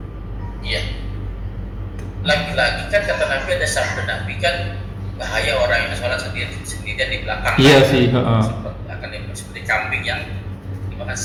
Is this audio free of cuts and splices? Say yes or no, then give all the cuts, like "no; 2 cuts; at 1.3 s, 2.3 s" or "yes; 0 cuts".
yes; 0 cuts